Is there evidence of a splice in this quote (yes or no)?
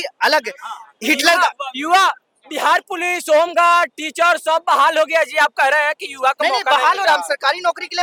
no